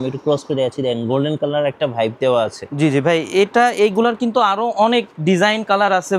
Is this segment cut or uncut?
uncut